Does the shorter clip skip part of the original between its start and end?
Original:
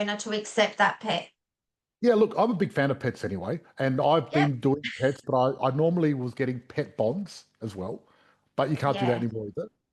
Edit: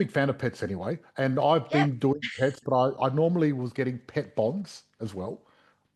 no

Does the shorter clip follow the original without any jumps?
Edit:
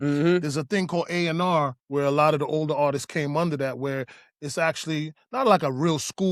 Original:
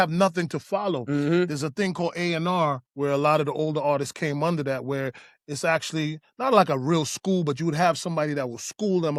yes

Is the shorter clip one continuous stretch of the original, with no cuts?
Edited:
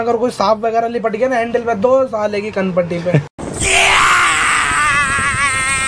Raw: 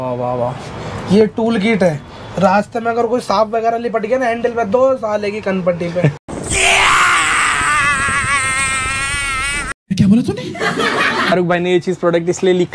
yes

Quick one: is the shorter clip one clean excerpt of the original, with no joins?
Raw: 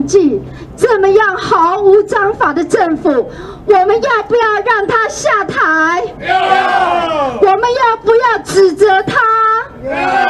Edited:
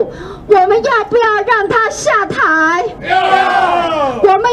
yes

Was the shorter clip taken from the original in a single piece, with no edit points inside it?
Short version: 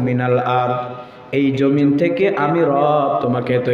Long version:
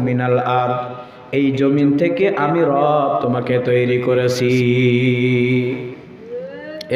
yes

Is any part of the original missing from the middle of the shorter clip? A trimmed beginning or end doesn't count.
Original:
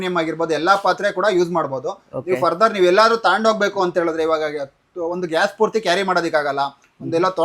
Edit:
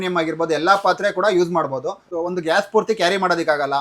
yes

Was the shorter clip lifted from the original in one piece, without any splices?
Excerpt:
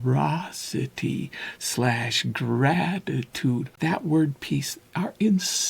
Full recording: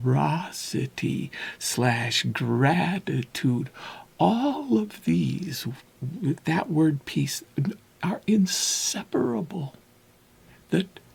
no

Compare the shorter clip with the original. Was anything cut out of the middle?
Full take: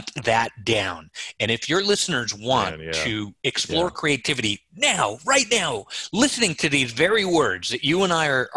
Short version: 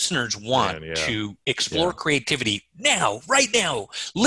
no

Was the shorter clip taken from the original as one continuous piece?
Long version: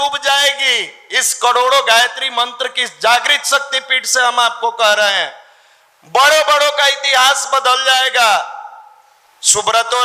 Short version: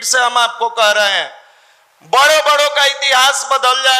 yes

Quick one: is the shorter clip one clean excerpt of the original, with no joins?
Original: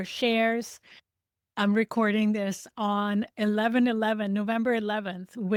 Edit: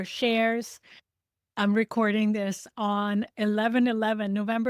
yes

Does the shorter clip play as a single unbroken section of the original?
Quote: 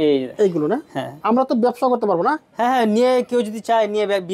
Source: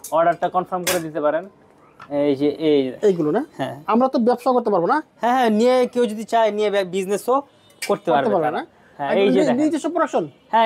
yes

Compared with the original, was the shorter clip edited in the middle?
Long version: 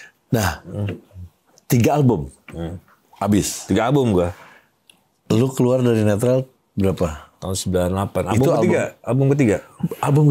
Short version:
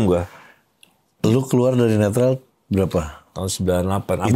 no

